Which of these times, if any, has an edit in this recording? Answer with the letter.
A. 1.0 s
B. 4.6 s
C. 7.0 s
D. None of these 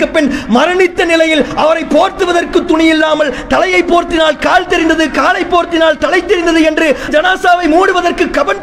C